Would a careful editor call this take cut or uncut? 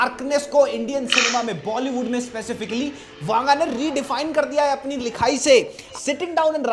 cut